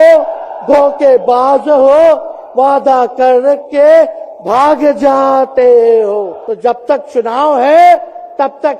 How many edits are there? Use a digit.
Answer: 1